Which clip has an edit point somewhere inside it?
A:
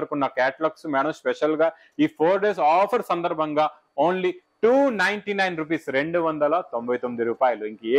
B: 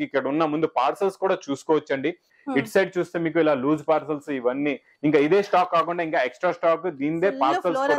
B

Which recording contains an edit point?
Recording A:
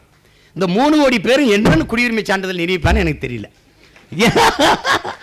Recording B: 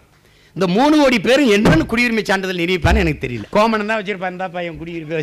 B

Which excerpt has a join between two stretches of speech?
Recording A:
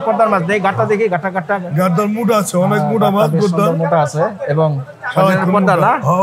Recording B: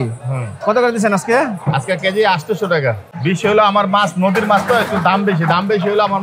B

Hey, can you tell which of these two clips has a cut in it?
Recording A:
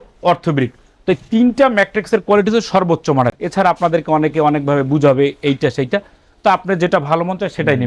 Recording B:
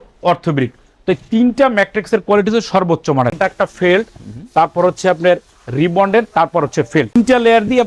B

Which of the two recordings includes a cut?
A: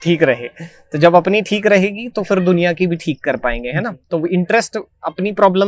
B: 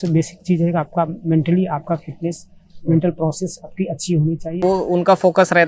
B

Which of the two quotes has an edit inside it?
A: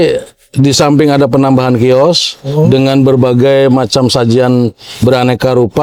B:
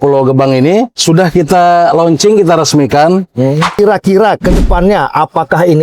B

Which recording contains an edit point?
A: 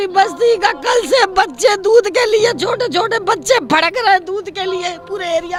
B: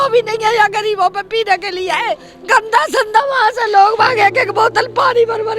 B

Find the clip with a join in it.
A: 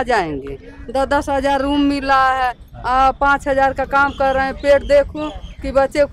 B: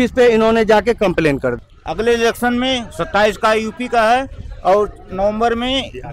B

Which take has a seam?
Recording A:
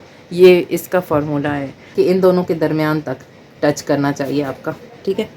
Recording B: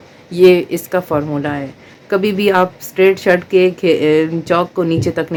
A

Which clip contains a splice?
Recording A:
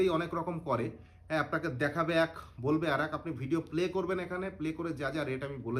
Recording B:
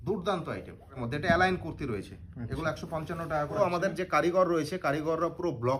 B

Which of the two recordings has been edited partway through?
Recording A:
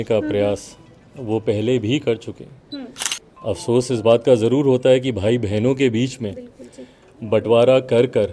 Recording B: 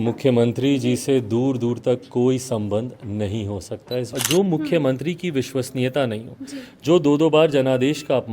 B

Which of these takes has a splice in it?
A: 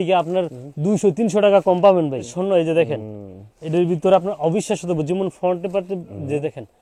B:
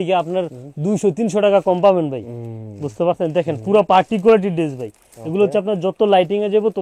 A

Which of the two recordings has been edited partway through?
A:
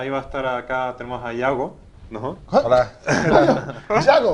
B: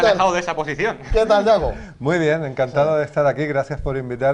B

